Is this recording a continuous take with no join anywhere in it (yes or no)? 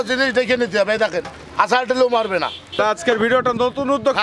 no